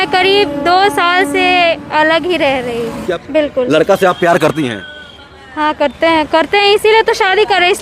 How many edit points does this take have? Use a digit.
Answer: 1